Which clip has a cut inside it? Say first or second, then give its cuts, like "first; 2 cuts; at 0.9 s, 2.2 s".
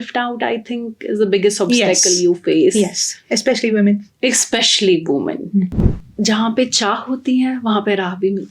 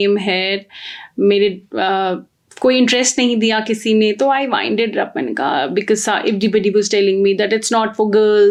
first; 1 cut; at 5.7 s